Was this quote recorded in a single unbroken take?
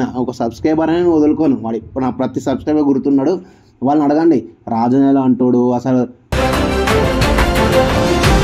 yes; 0 cuts

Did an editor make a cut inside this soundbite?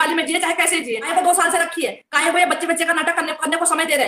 yes; 1 cut; at 1.0 s

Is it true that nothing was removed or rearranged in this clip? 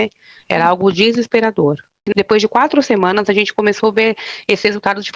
no; 1 cut; at 2.0 s

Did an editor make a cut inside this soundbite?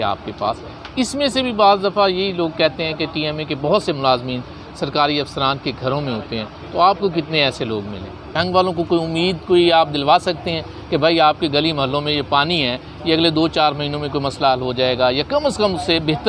yes; 1 cut; at 8.3 s

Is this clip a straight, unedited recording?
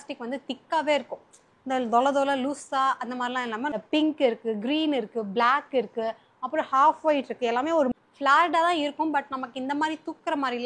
no; 2 cuts; at 3.7 s, 7.9 s

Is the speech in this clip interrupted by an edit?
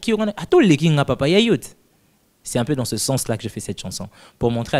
no; 0 cuts

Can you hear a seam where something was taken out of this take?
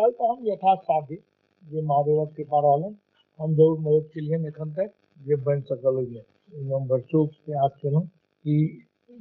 yes; 2 cuts; at 5.1 s, 8.2 s

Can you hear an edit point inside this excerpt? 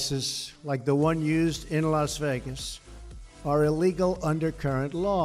no; 0 cuts

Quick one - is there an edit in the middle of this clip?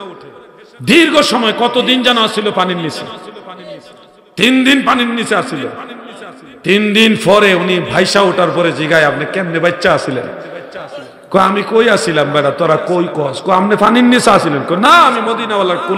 no; 0 cuts

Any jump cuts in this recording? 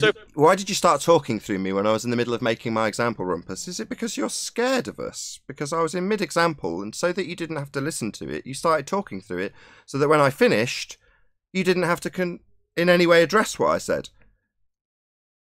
no; 0 cuts

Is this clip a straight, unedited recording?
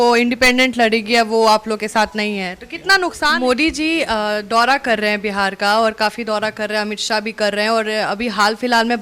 no; 1 cut; at 3.3 s

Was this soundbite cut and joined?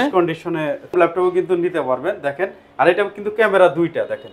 yes; 1 cut; at 0.9 s

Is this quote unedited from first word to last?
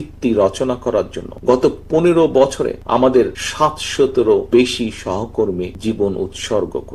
no; 5 cuts; at 1.2 s, 2.8 s, 3.4 s, 4.5 s, 5.7 s

